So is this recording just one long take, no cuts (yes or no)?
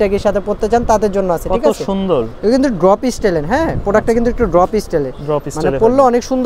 yes